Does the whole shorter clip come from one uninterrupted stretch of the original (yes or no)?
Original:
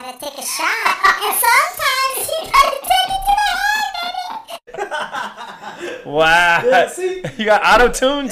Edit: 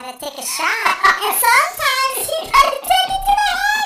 yes